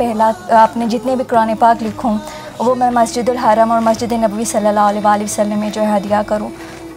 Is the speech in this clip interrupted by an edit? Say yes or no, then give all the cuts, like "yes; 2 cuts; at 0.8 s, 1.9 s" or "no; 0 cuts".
no; 0 cuts